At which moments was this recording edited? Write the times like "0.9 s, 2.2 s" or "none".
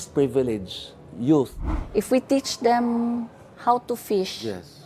1.6 s